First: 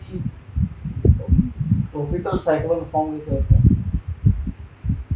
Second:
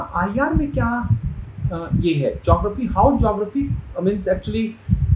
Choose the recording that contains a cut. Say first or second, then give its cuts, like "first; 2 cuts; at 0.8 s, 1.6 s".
first; 1 cut; at 4.1 s